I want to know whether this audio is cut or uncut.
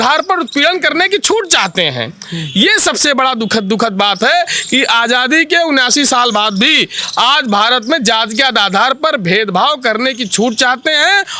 uncut